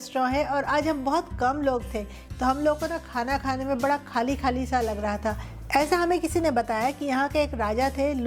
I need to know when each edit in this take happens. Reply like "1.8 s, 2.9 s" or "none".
2.2 s, 5.5 s